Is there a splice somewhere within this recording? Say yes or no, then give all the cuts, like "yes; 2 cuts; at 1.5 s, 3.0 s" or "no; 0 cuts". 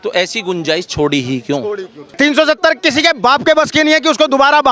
yes; 1 cut; at 2.0 s